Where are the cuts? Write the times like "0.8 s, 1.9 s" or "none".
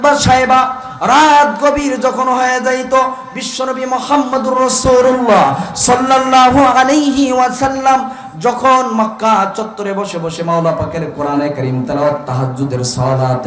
none